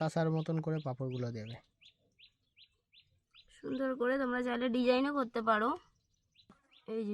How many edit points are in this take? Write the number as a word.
zero